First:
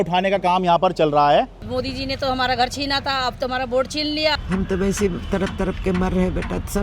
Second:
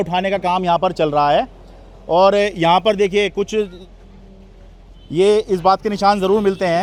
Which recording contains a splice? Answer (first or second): first